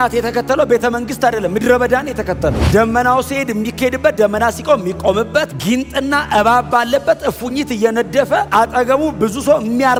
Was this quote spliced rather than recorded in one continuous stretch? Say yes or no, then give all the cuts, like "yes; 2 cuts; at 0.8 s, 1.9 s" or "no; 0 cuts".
no; 0 cuts